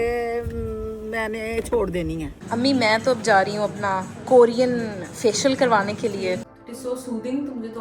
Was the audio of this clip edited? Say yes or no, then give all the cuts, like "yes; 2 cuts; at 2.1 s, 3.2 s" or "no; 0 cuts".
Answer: yes; 2 cuts; at 2.4 s, 6.5 s